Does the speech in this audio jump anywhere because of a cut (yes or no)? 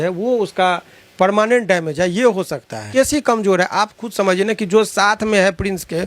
yes